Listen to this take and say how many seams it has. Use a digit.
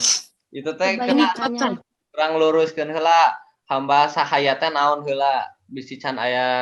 0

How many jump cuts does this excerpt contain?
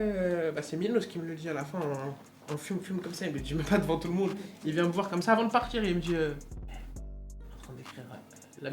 0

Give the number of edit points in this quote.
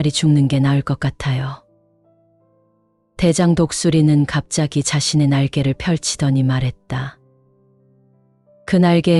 0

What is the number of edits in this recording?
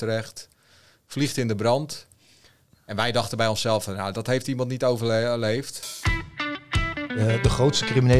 1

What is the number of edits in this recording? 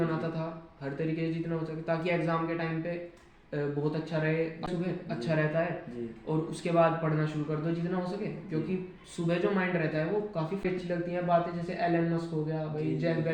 2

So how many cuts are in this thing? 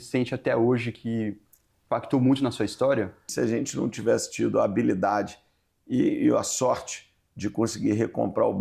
1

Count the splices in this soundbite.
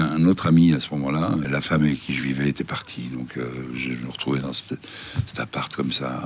1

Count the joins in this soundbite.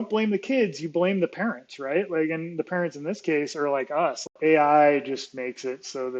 1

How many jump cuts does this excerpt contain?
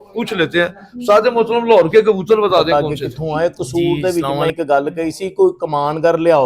1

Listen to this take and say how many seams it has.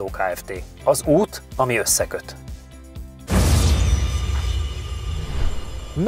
0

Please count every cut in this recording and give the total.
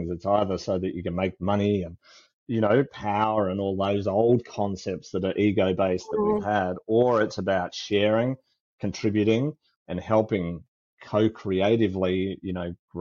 0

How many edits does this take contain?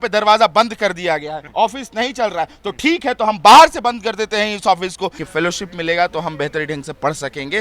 2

